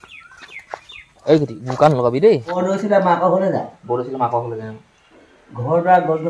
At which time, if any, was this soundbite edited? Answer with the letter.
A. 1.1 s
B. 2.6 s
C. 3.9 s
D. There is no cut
B